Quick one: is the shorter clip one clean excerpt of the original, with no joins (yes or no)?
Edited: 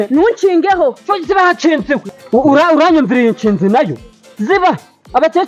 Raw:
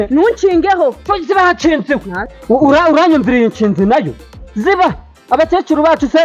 no